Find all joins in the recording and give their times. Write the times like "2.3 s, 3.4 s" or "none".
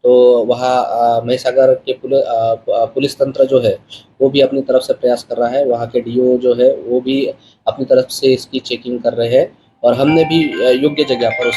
none